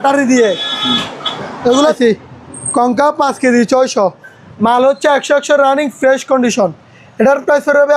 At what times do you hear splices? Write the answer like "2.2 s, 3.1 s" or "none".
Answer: 2.0 s